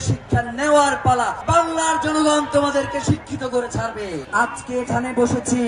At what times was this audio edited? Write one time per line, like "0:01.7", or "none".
0:01.4
0:04.2